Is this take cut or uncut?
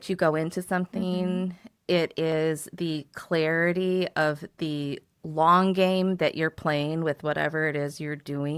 uncut